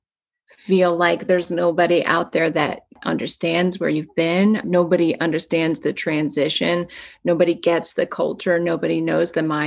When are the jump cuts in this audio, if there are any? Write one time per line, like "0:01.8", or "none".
0:02.9
0:04.6